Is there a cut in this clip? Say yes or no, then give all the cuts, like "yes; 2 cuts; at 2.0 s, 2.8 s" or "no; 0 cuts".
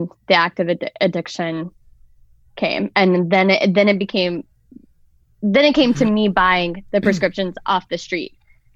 no; 0 cuts